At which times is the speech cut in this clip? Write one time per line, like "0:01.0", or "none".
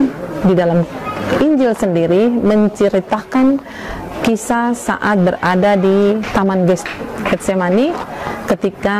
0:06.3